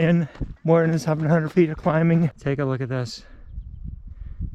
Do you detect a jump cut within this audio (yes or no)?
yes